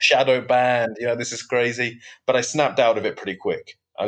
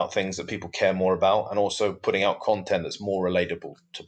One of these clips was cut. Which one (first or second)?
first